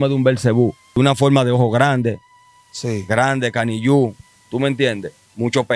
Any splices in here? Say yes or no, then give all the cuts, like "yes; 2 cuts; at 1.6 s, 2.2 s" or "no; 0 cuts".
yes; 1 cut; at 0.9 s